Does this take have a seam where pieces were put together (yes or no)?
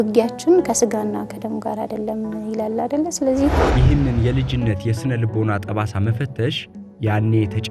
yes